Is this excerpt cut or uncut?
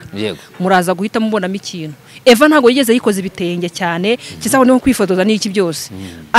uncut